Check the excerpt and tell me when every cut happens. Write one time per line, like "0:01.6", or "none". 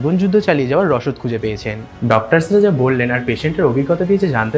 0:01.8